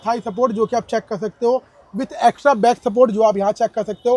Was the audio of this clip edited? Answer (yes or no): no